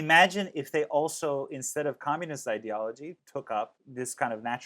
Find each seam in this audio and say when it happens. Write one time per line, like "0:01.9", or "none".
0:03.2
0:03.8